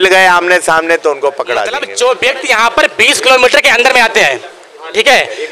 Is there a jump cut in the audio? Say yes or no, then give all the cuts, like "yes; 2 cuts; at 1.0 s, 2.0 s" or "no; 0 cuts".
yes; 1 cut; at 1.8 s